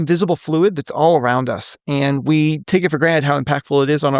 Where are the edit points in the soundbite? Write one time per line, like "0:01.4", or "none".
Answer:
0:02.6